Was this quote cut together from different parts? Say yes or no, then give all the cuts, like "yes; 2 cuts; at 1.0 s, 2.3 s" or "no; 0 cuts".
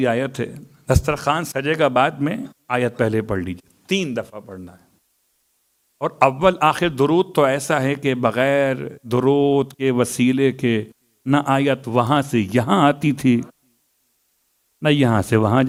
no; 0 cuts